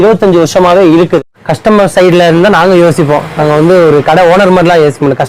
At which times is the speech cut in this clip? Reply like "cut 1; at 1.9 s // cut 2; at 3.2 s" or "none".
cut 1; at 1.3 s